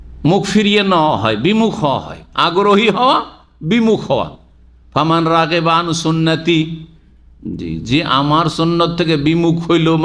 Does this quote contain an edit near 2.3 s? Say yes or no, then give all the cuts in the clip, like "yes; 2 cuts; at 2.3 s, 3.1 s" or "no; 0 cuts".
no; 0 cuts